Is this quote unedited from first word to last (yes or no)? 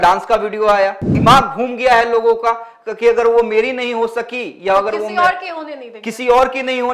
no